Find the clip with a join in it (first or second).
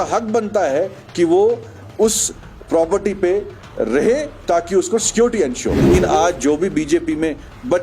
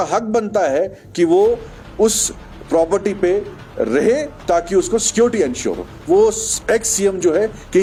first